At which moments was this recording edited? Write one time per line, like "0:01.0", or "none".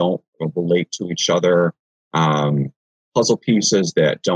none